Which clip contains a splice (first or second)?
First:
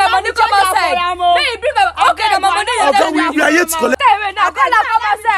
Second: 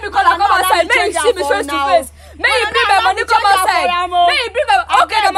first